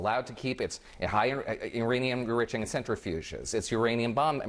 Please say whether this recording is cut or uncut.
uncut